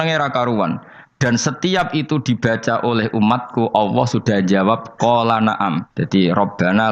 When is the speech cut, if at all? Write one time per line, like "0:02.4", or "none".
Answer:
0:05.9

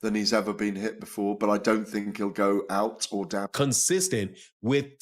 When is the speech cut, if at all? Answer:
0:03.5

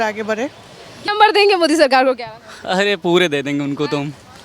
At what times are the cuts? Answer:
0:01.0

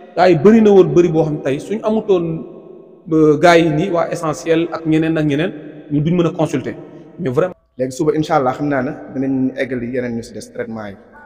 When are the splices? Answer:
0:07.5

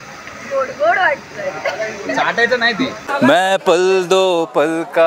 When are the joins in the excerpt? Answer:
0:03.0

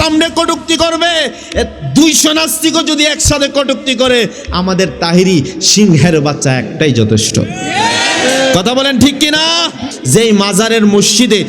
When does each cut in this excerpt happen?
0:09.9

